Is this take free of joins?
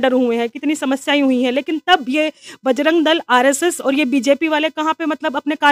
yes; 0 cuts

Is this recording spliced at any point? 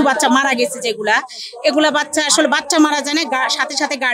no; 0 cuts

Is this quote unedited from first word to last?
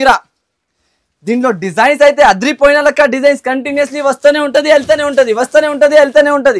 yes; 0 cuts

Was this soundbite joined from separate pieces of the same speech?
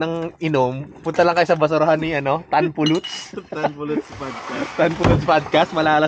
no; 0 cuts

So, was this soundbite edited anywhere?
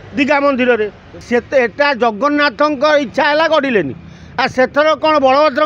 yes; 1 cut; at 1.2 s

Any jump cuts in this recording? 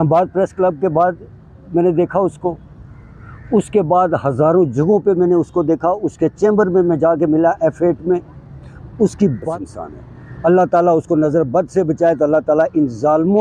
yes; 1 cut; at 9.5 s

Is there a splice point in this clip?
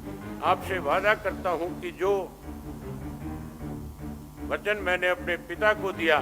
yes; 2 cuts; at 2.8 s, 4.5 s

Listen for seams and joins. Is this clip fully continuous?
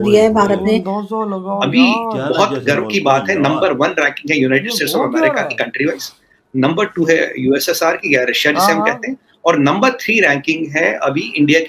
no; 1 cut; at 1.0 s

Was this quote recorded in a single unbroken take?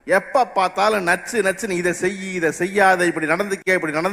yes; 0 cuts

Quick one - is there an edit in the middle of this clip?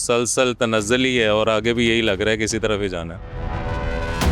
yes; 1 cut; at 3.3 s

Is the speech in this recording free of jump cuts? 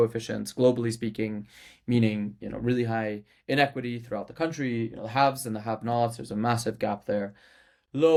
yes; 0 cuts

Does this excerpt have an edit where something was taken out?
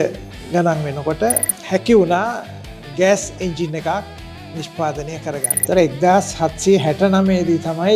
no; 0 cuts

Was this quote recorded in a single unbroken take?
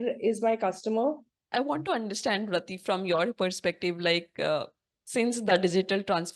no; 1 cut; at 1.3 s

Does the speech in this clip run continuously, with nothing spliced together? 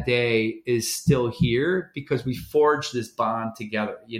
yes; 0 cuts

